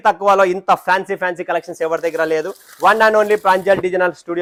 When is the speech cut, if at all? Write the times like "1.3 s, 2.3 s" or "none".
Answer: none